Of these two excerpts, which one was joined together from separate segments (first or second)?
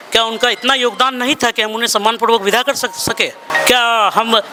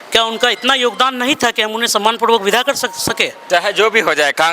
second